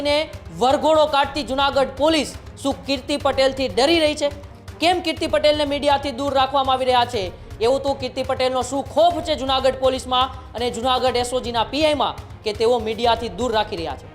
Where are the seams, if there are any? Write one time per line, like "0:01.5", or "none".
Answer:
none